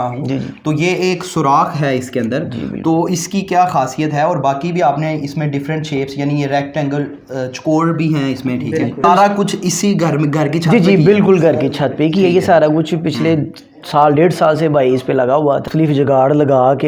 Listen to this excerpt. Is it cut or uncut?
cut